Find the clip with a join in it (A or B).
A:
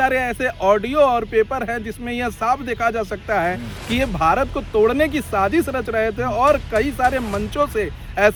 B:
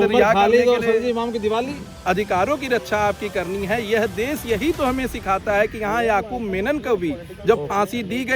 B